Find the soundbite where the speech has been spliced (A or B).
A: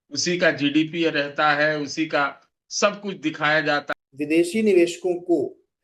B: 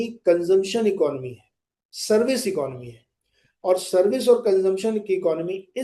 A